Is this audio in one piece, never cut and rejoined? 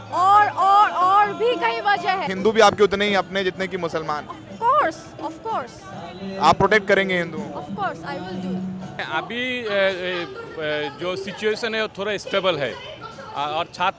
no; 2 cuts; at 2.3 s, 9.0 s

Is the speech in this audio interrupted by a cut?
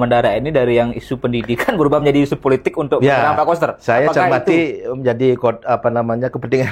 no; 0 cuts

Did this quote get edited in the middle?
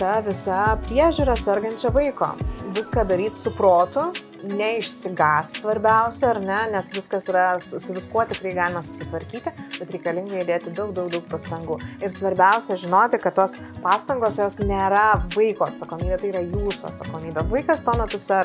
no; 0 cuts

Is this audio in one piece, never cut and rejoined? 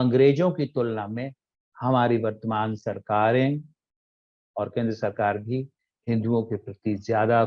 yes; 0 cuts

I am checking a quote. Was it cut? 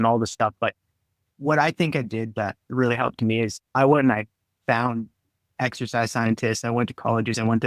yes; 1 cut; at 1.2 s

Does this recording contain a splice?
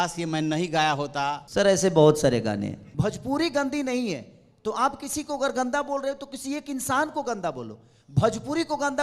yes; 2 cuts; at 1.4 s, 2.8 s

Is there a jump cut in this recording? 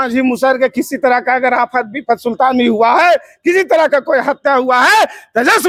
no; 0 cuts

